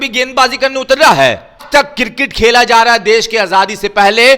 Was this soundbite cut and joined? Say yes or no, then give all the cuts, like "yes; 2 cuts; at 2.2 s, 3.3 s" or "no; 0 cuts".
yes; 1 cut; at 1.6 s